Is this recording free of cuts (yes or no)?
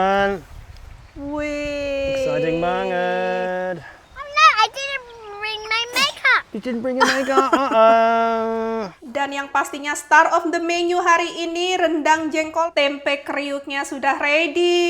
no